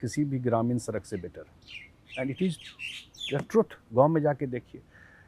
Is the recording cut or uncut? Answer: uncut